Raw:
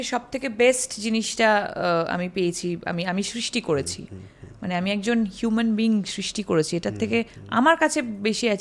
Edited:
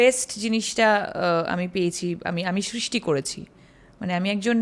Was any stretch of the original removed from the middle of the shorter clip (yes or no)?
no